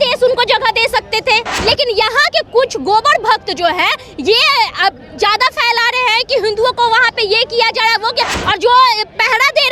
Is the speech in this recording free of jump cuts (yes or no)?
no